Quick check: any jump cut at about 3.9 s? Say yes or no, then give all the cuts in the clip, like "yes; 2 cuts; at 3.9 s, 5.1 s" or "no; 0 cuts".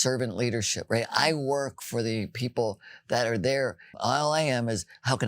yes; 1 cut; at 3.9 s